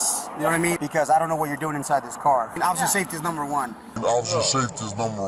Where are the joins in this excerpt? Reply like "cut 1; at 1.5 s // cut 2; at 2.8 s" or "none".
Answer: cut 1; at 0.8 s // cut 2; at 2.6 s